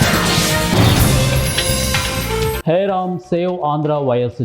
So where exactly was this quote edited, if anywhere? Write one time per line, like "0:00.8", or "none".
0:02.6